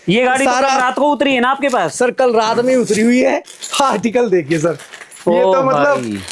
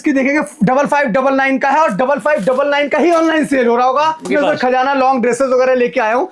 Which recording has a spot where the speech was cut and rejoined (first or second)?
second